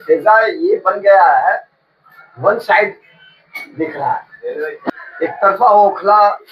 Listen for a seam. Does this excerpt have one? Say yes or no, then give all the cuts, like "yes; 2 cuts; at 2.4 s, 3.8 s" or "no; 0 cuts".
yes; 1 cut; at 4.9 s